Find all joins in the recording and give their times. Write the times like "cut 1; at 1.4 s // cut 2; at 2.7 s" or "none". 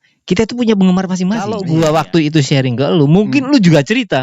cut 1; at 1.5 s